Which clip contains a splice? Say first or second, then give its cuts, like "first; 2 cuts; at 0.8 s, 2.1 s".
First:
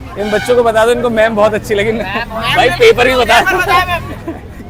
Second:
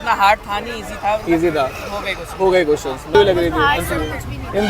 second; 1 cut; at 3.1 s